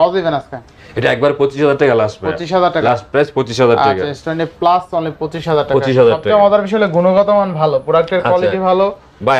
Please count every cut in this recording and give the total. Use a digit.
0